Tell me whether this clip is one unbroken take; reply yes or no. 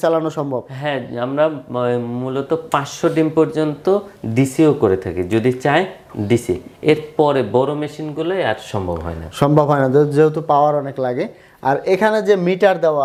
yes